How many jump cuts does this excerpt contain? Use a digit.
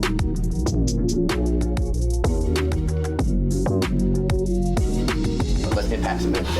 0